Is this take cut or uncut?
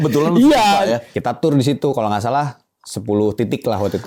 cut